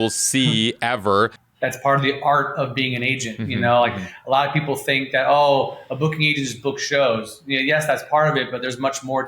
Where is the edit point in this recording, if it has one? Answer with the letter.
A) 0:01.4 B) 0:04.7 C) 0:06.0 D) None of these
A